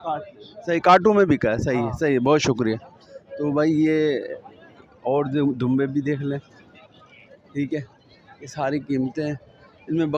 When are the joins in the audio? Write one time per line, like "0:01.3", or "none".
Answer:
none